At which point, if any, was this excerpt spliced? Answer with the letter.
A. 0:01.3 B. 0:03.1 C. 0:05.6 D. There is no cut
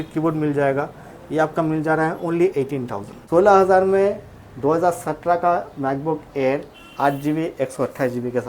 B